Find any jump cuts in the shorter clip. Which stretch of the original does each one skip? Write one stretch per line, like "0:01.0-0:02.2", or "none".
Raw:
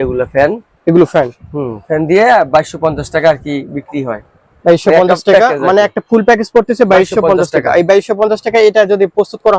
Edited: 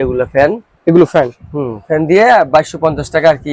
none